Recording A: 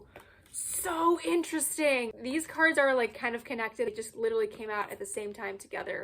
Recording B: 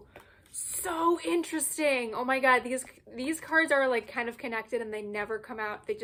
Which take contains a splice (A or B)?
A